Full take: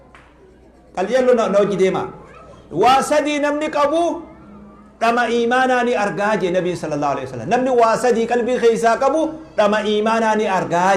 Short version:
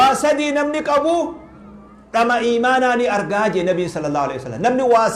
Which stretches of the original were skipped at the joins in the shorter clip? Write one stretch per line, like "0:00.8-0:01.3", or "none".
none